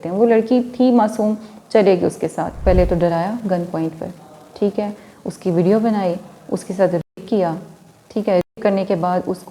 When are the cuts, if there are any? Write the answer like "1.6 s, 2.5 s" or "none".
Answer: 2.6 s